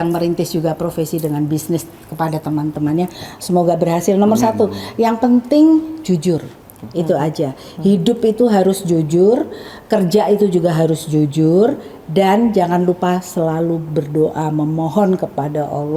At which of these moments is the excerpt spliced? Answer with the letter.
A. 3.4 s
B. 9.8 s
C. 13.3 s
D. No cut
D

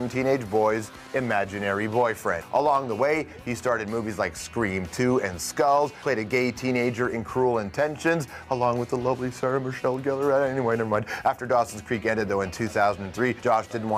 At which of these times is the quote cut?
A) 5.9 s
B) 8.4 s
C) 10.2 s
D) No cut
A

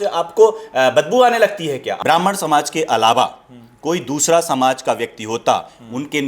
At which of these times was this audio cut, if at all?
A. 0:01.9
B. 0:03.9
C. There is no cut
A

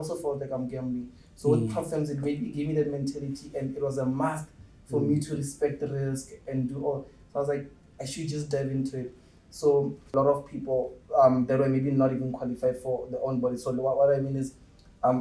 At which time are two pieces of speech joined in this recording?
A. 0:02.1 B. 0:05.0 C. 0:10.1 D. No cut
C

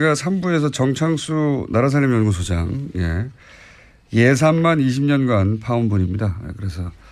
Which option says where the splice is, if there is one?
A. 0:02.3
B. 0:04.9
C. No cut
A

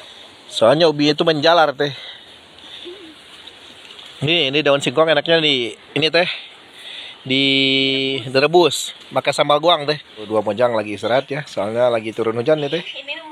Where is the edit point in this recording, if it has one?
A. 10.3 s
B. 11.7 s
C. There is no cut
A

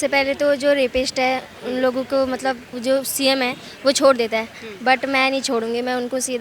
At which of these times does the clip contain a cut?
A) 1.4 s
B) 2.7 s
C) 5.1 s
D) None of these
B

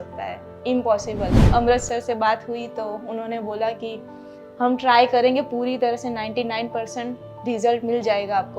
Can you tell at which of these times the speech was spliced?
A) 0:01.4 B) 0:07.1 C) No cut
A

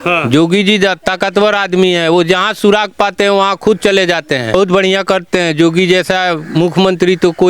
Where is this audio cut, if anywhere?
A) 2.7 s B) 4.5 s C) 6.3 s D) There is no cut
B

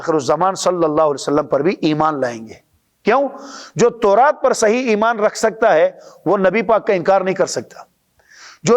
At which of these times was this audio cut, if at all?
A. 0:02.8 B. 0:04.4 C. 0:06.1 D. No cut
D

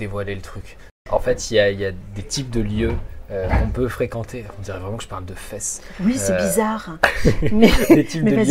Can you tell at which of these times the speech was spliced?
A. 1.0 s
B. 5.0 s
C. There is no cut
A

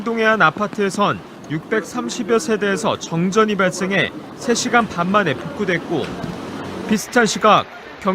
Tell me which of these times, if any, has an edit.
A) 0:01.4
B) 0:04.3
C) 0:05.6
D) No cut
B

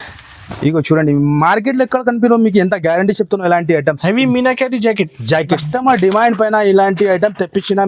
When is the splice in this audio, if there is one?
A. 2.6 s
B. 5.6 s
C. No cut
B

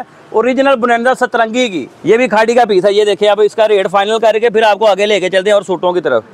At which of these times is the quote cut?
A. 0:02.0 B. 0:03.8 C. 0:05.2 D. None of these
A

